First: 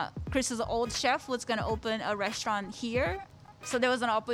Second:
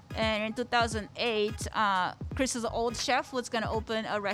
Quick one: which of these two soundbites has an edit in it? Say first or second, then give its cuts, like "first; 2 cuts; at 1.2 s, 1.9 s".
first; 1 cut; at 3.2 s